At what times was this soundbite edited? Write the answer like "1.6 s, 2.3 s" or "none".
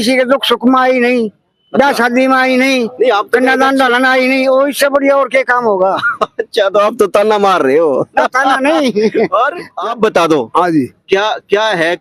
9.7 s